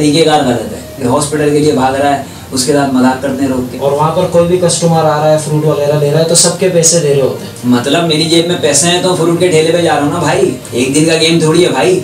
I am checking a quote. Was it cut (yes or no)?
yes